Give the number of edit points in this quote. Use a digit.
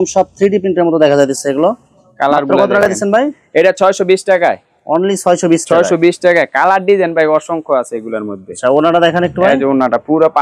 0